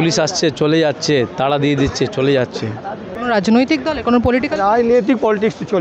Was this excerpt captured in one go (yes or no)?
no